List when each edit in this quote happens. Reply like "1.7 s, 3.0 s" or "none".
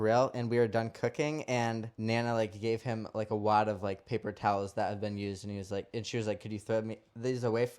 1.9 s